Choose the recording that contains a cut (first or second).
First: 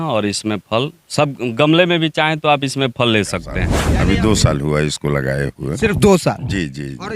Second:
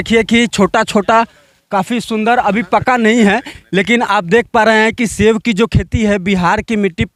first